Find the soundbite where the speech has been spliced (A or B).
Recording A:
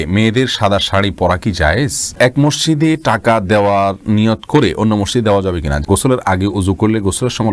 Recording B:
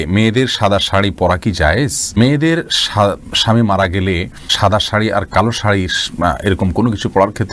A